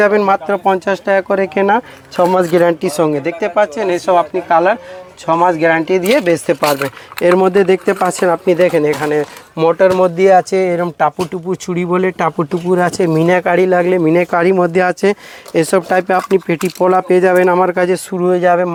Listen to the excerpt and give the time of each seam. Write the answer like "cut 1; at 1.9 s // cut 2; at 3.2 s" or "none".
none